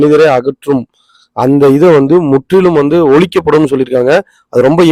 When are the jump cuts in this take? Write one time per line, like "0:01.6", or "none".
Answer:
none

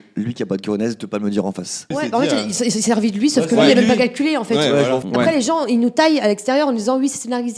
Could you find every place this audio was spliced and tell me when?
0:01.9
0:05.0

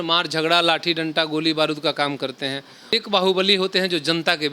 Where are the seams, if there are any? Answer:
0:02.9

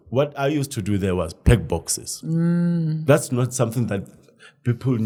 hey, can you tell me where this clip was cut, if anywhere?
none

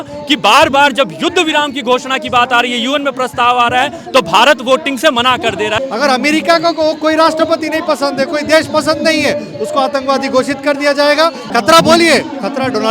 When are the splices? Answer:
0:05.8
0:11.4

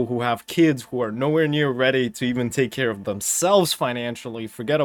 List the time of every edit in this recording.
none

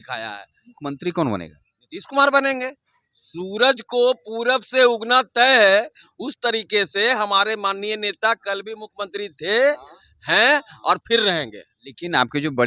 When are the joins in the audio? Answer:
none

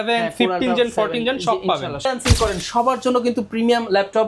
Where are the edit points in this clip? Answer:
0:02.1

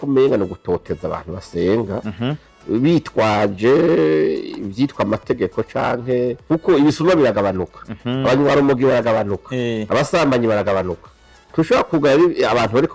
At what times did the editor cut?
0:06.4

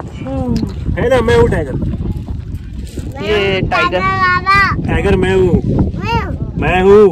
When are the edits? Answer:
none

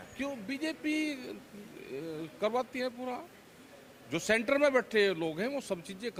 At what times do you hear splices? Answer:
none

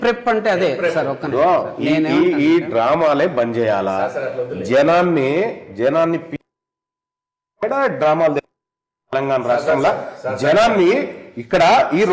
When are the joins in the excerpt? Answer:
none

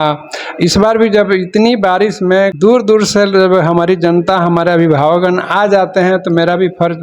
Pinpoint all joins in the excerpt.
0:02.5

